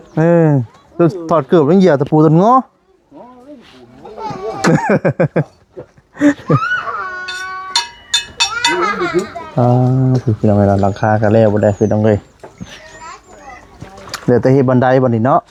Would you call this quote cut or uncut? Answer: uncut